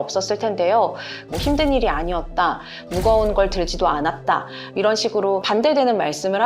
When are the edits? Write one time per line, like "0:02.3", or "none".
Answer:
0:01.3
0:05.4